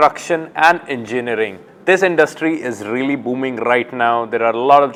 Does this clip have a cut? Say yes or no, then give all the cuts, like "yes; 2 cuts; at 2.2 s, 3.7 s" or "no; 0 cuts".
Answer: no; 0 cuts